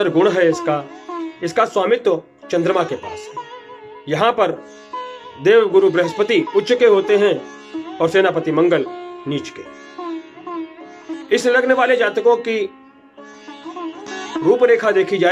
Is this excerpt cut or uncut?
uncut